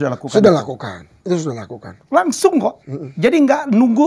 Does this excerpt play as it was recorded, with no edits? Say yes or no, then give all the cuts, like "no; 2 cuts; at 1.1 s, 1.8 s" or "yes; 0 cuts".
yes; 0 cuts